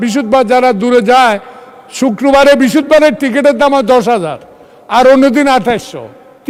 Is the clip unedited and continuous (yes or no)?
yes